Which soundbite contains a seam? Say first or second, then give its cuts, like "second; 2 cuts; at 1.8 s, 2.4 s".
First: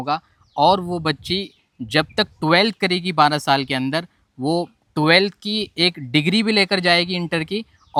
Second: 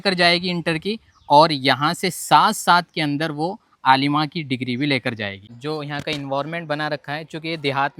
second; 1 cut; at 5.5 s